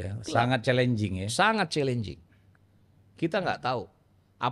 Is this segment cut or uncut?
uncut